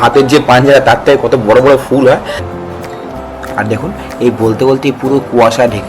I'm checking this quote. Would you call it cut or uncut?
cut